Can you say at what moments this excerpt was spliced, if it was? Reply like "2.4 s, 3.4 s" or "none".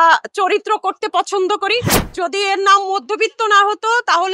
2.0 s

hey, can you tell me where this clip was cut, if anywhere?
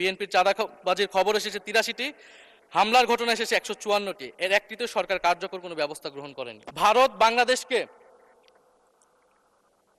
6.6 s

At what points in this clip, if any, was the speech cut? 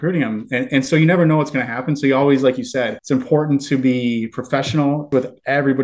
3.0 s, 5.1 s

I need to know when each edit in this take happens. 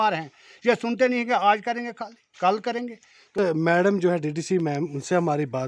3.4 s

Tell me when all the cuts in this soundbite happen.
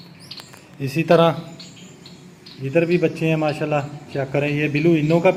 none

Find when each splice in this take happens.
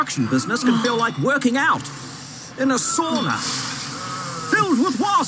none

